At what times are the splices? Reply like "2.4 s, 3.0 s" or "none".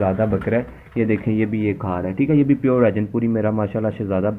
none